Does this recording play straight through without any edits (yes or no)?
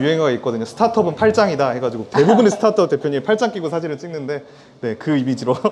yes